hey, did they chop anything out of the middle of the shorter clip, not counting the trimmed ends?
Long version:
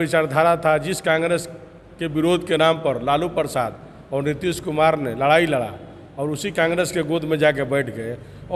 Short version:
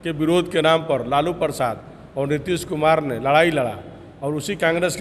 no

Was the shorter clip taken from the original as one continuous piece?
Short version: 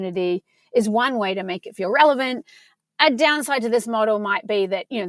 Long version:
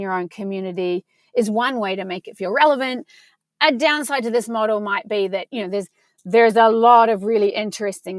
yes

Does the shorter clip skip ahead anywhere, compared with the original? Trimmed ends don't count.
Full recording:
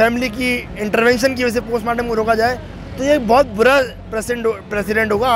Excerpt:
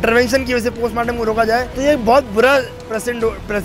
yes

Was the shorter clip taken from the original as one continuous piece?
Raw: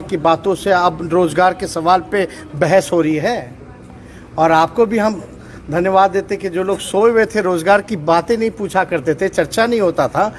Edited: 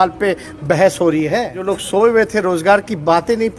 no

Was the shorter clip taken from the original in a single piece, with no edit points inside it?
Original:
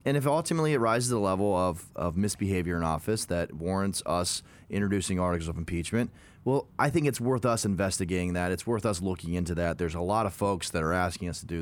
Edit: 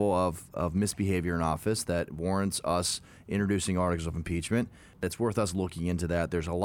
no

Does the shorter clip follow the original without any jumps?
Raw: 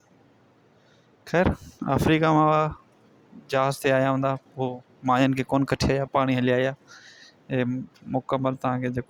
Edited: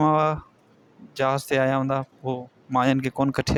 yes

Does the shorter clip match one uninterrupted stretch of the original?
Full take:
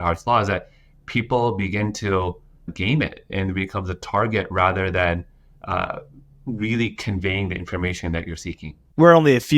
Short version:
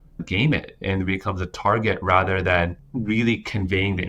no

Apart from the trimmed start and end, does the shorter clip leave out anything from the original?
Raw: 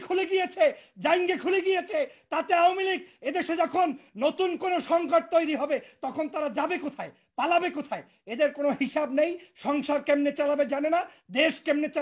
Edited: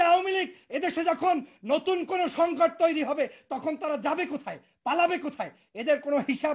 no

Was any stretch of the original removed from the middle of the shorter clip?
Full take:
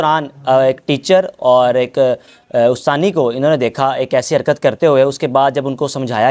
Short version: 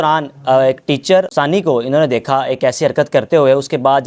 yes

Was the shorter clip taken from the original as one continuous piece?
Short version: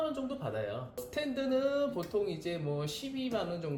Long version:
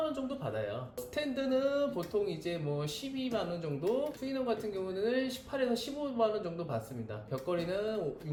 yes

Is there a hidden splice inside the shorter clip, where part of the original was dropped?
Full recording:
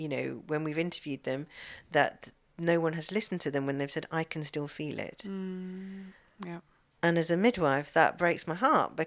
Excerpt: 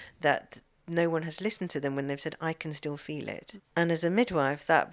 yes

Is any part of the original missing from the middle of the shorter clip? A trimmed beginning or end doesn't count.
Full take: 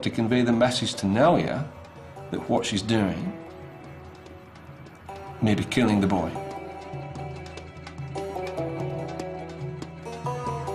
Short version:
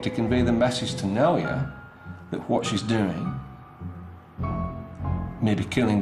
no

